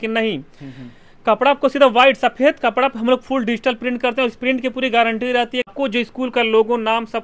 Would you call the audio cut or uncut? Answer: cut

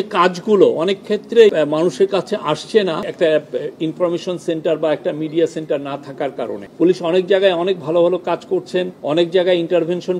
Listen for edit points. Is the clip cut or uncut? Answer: cut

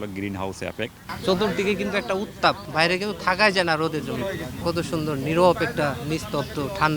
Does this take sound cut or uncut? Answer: cut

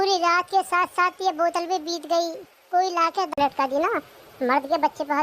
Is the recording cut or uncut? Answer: cut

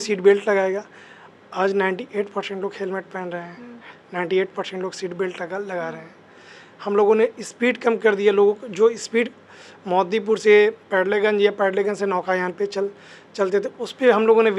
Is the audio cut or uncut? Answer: uncut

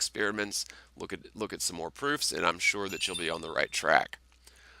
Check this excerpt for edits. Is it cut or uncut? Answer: cut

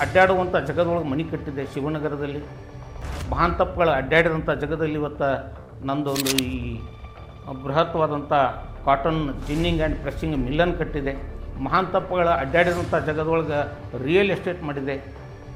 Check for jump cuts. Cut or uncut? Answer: uncut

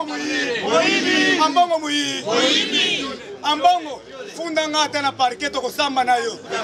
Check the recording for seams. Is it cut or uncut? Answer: uncut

